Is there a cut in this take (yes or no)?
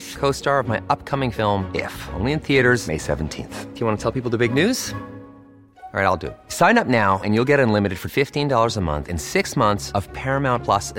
no